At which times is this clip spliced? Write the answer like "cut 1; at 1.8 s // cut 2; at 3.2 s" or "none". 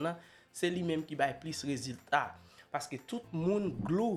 none